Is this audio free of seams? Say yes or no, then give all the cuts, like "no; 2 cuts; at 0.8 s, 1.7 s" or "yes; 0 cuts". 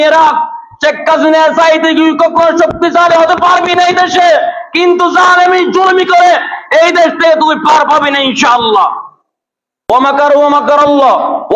no; 1 cut; at 9.8 s